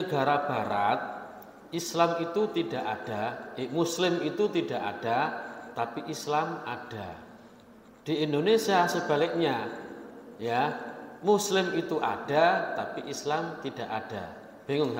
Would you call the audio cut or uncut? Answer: uncut